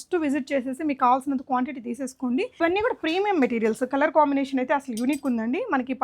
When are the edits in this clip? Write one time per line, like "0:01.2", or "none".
0:02.5